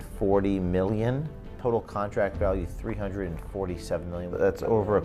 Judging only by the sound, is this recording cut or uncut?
cut